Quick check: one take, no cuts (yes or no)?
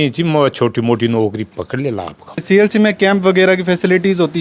no